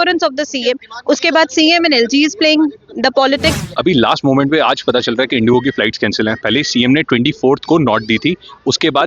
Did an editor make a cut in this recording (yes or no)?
yes